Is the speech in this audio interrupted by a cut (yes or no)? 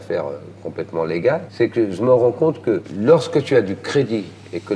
yes